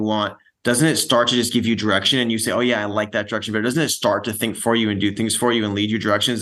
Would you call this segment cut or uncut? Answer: uncut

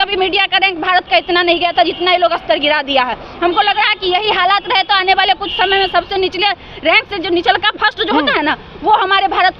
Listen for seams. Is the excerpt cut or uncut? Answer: uncut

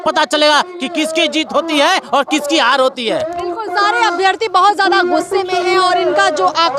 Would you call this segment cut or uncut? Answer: uncut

